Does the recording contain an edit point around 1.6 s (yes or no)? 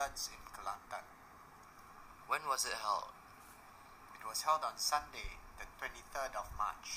yes